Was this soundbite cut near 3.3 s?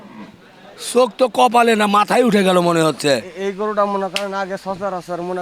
yes; 1 cut; at 3.3 s

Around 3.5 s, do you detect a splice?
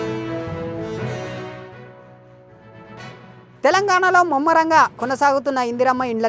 yes; 1 cut; at 3.5 s

